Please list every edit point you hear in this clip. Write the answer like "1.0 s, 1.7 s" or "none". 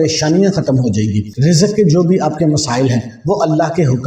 1.3 s

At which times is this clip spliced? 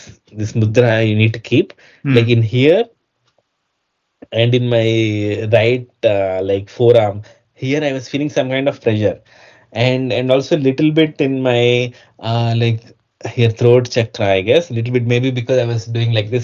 none

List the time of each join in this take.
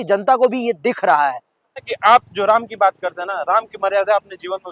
1.8 s

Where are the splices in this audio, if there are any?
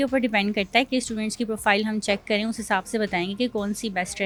none

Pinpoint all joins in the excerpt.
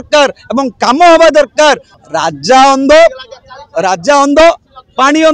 1.9 s

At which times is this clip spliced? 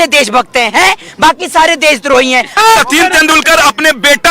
2.5 s

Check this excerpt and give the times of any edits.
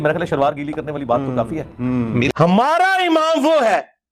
2.3 s

